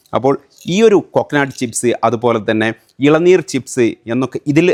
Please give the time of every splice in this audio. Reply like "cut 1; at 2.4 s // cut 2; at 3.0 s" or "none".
none